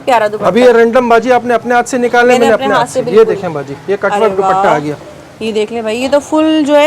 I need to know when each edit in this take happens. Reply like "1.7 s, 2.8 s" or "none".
none